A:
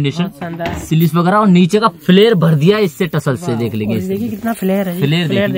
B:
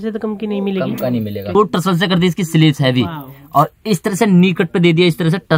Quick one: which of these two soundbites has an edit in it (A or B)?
B